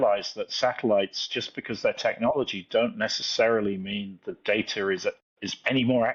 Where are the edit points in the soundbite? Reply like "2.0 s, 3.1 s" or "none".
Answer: none